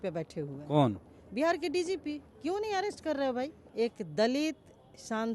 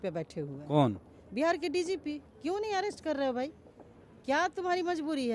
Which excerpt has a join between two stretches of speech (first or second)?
first